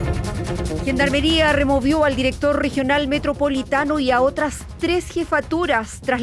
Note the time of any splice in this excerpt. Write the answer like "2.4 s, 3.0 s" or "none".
0.9 s

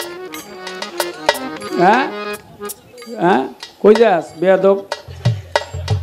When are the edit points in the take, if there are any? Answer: none

